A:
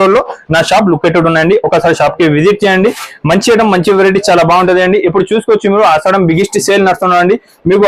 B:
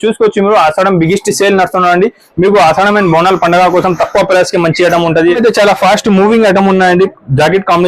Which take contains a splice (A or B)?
B